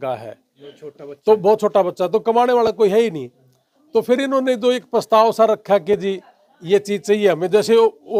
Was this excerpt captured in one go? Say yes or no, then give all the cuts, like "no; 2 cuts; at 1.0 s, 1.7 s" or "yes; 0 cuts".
yes; 0 cuts